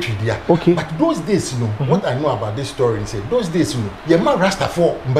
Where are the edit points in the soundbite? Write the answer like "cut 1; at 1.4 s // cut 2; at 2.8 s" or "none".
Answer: cut 1; at 3.9 s